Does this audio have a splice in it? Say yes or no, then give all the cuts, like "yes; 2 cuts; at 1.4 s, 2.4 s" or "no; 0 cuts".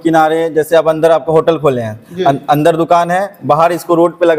no; 0 cuts